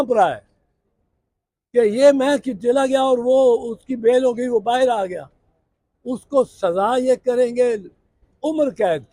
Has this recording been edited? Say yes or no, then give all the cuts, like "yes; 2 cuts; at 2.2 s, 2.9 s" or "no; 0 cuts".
no; 0 cuts